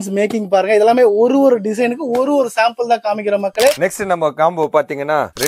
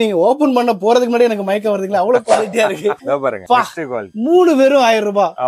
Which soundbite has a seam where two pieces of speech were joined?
first; 1 cut; at 3.8 s

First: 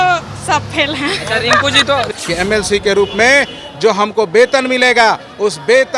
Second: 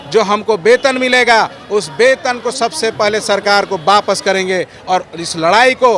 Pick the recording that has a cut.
first; 1 cut; at 2.1 s

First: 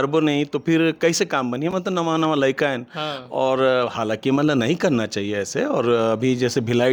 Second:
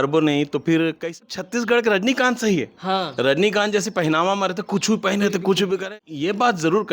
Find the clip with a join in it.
second; 2 cuts; at 1.3 s, 5.9 s

